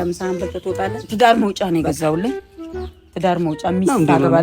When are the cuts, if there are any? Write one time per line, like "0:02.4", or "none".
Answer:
0:01.0